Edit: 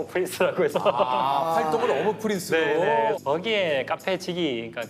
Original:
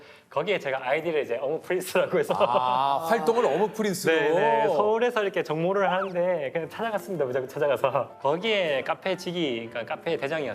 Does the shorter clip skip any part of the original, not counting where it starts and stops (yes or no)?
yes